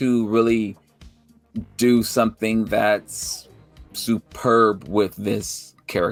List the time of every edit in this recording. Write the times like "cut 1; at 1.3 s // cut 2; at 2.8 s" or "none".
none